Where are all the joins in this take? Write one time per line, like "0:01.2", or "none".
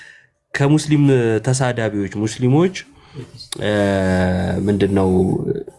none